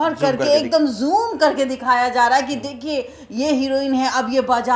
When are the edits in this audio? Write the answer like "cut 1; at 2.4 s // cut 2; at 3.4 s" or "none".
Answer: none

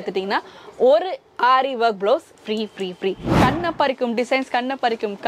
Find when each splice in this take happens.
cut 1; at 3.4 s

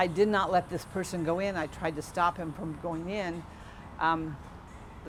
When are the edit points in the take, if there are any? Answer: none

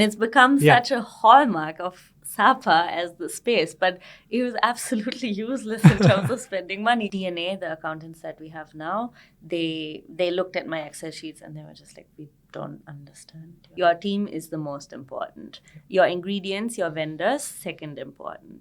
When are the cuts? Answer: cut 1; at 7.1 s // cut 2; at 13.6 s

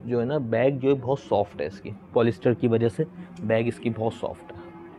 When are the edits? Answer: none

